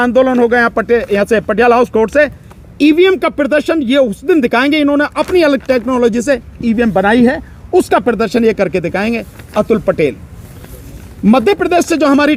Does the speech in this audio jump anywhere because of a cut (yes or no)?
no